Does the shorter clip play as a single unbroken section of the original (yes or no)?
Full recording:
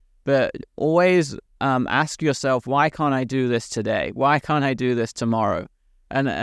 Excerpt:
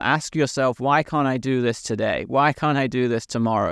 yes